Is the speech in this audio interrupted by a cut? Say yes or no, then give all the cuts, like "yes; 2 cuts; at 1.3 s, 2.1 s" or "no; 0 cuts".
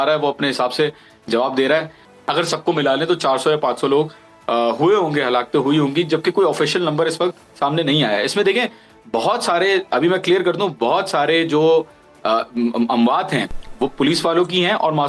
yes; 1 cut; at 2.0 s